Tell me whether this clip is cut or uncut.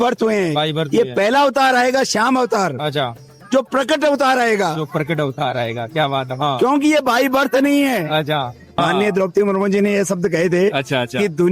cut